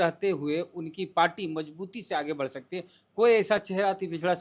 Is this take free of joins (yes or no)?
yes